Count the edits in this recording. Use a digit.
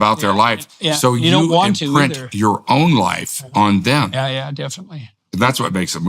1